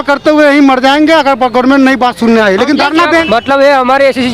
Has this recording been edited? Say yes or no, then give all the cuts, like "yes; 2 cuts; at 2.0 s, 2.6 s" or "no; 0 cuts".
yes; 1 cut; at 3.1 s